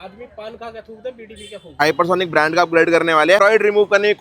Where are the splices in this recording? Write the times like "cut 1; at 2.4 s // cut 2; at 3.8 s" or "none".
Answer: cut 1; at 1.7 s // cut 2; at 3.4 s